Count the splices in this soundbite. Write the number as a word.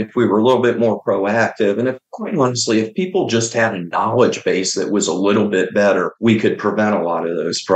one